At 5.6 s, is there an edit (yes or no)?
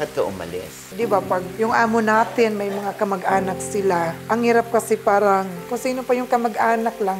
yes